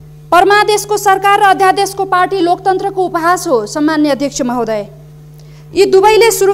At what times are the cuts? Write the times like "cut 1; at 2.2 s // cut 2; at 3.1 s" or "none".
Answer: none